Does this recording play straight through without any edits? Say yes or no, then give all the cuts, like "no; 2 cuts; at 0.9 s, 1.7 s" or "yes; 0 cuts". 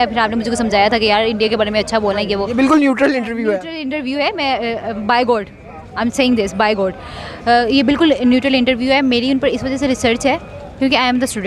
yes; 0 cuts